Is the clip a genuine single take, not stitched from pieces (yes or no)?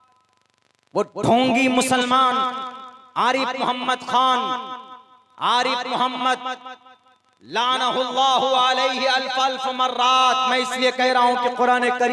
yes